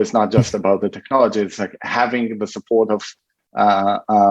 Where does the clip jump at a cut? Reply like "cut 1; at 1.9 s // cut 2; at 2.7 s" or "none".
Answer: none